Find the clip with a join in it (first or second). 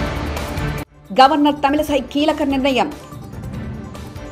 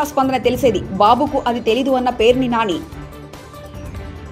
first